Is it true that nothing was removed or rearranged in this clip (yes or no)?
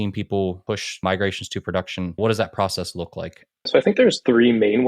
no